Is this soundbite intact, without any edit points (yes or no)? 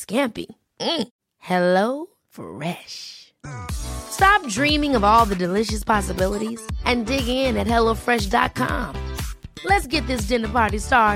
yes